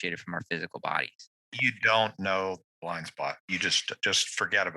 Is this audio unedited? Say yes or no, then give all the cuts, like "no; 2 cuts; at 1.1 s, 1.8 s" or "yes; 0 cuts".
no; 1 cut; at 1.7 s